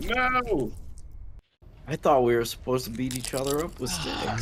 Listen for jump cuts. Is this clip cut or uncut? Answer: uncut